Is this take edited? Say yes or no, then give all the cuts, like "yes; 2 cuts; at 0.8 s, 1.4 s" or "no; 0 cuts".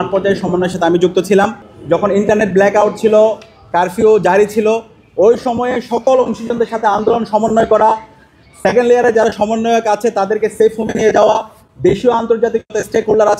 yes; 1 cut; at 1.7 s